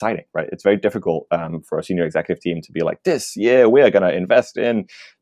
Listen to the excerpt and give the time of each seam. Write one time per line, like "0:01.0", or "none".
none